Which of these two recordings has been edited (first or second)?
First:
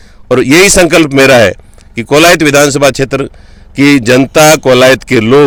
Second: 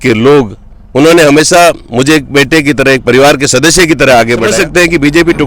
second